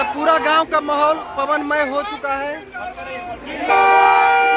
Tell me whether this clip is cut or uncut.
uncut